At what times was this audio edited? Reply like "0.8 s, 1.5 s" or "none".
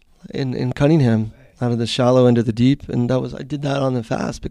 1.5 s